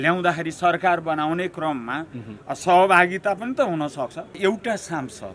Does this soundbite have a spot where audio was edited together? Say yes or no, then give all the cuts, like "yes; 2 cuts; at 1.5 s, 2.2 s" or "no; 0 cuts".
yes; 1 cut; at 4.4 s